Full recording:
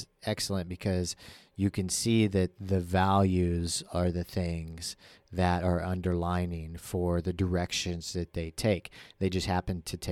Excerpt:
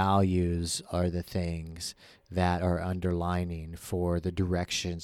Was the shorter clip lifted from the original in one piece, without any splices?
yes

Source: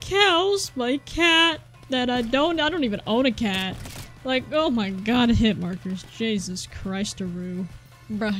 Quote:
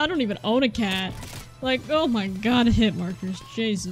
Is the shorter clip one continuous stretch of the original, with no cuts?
yes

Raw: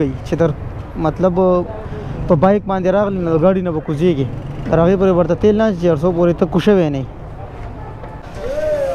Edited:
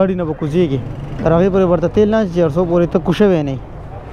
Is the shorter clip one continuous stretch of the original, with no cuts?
yes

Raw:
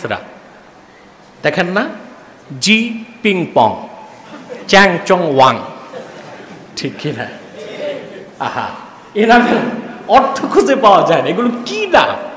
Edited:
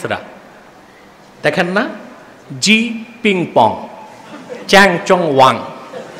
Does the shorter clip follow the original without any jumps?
yes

